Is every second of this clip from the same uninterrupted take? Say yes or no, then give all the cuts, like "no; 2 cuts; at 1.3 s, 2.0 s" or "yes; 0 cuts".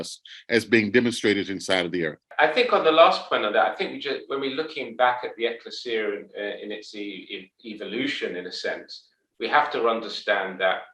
no; 1 cut; at 2.3 s